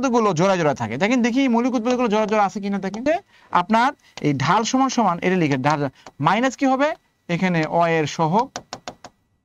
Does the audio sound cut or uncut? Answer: cut